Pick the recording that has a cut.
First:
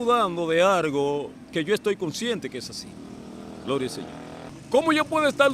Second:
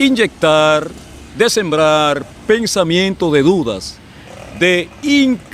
first; 1 cut; at 4.5 s

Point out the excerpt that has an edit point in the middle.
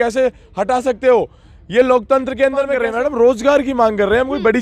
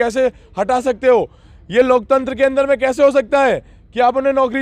first; 1 cut; at 2.8 s

